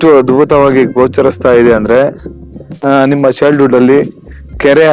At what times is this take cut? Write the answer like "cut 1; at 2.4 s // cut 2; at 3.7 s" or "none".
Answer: cut 1; at 2.8 s